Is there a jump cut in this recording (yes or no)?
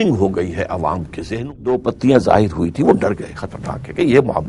yes